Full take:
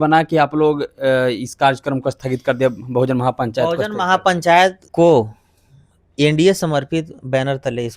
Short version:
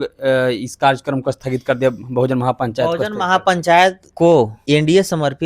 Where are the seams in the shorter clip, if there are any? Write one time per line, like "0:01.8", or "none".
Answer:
0:04.0